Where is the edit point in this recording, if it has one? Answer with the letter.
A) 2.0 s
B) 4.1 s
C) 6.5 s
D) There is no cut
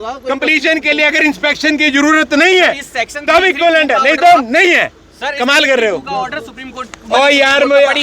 D